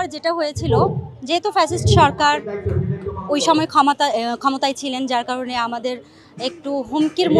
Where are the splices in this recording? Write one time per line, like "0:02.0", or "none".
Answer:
none